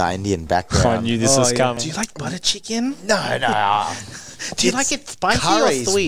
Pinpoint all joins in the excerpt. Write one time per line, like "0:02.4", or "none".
0:01.8